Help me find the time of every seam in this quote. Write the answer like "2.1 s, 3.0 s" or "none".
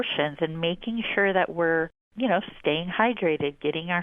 2.0 s